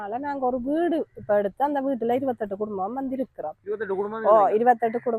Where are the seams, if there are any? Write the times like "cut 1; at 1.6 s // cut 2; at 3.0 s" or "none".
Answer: none